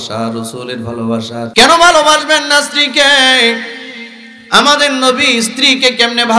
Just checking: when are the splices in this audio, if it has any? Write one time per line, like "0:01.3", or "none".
0:01.5